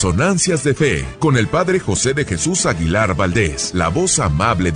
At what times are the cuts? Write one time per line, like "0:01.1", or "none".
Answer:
0:01.1
0:03.6